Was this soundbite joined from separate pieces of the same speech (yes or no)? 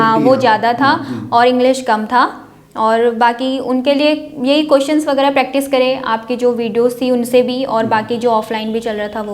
no